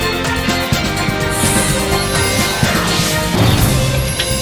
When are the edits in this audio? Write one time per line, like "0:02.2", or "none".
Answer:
none